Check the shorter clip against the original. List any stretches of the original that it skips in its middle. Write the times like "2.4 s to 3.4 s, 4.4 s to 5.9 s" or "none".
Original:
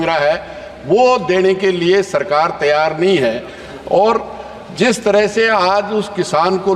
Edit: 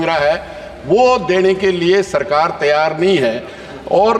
none